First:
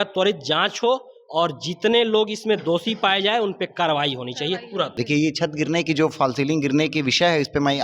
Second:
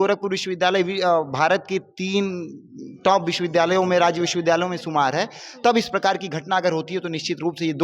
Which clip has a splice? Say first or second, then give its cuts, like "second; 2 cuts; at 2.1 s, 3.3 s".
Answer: first; 1 cut; at 4.9 s